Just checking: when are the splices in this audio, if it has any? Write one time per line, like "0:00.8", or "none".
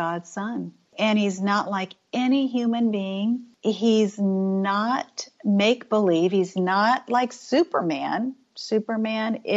0:03.5